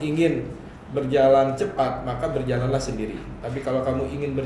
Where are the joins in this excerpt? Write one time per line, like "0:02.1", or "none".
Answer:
none